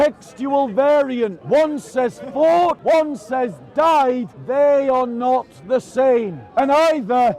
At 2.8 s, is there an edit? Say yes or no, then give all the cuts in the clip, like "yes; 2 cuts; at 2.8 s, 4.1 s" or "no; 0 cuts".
yes; 4 cuts; at 1.4 s, 2.8 s, 4.3 s, 6.4 s